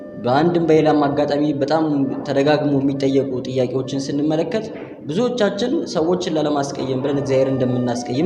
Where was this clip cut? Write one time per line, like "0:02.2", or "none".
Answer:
none